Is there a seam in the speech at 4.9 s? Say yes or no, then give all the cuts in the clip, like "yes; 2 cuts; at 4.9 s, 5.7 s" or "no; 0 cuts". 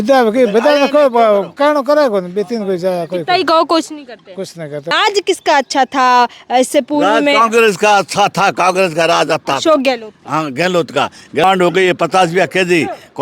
yes; 2 cuts; at 4.9 s, 11.4 s